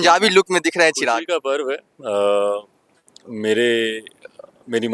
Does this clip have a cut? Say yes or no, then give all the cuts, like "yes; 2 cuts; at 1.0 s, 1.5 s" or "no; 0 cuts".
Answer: no; 0 cuts